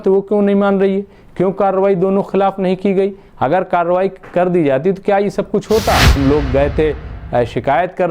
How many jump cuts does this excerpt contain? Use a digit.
1